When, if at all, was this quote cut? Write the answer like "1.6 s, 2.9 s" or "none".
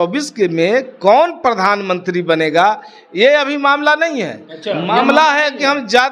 none

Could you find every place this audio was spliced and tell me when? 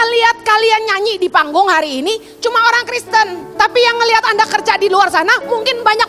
3.4 s

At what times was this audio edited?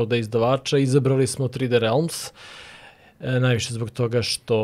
none

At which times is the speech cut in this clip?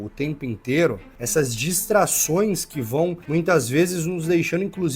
1.1 s, 3.2 s

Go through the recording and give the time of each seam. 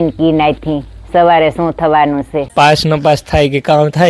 2.5 s

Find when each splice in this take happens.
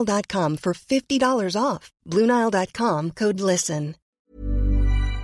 4.1 s

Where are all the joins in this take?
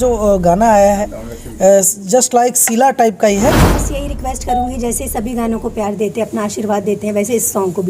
3.9 s

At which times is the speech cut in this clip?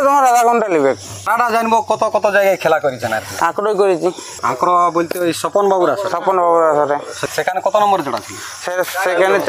1.2 s, 4.4 s, 7.2 s

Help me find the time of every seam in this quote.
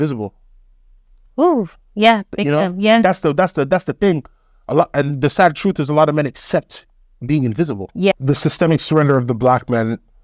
8.1 s

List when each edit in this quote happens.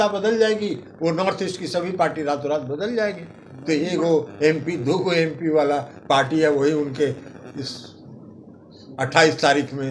none

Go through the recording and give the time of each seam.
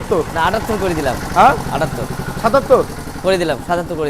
none

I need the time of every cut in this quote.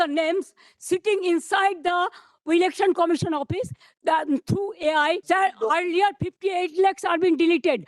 5.2 s

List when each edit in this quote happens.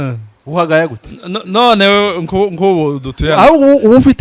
none

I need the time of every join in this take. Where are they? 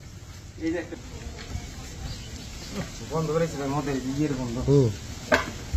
0.9 s

